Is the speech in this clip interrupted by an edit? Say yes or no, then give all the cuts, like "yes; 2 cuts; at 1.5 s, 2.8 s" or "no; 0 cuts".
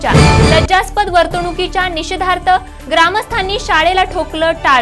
no; 0 cuts